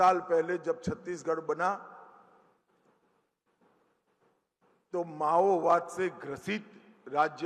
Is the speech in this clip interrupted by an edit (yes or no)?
no